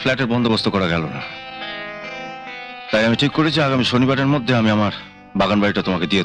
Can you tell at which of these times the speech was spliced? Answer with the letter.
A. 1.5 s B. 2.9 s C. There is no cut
C